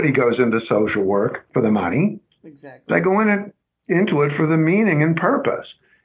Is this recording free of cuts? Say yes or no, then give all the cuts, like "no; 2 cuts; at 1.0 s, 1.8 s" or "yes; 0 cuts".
no; 1 cut; at 1.4 s